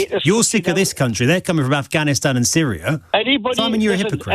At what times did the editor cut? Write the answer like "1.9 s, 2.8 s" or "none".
3.0 s